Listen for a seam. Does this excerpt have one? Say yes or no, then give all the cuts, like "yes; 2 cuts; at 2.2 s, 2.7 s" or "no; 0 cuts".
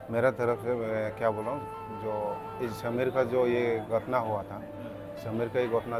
no; 0 cuts